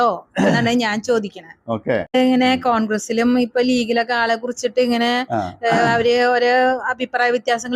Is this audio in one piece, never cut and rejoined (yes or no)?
no